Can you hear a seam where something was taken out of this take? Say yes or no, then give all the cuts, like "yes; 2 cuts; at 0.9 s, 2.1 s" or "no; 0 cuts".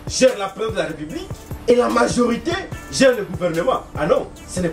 yes; 1 cut; at 1.7 s